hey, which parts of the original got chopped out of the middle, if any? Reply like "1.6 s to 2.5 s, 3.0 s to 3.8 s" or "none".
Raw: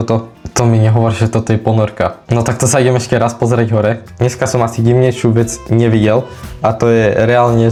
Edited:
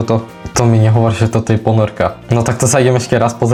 none